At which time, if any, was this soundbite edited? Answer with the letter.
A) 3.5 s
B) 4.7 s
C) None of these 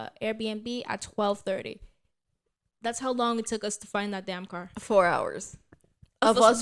C